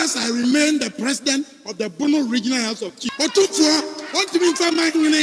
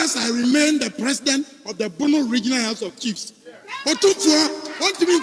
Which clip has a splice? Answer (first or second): first